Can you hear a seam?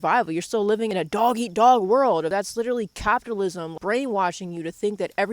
yes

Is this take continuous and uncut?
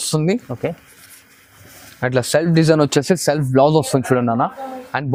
yes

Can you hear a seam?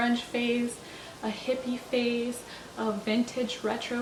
no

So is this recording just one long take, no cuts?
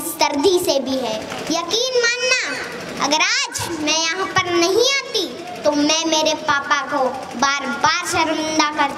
no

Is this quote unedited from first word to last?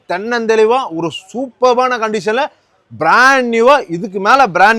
yes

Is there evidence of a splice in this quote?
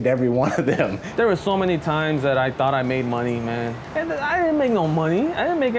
yes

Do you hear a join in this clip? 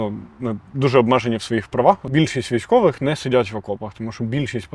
yes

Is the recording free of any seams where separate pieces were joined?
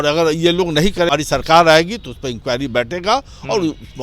no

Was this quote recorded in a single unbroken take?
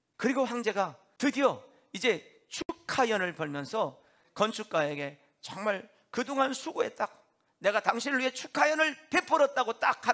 no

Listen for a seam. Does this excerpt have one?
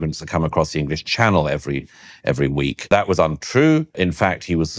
yes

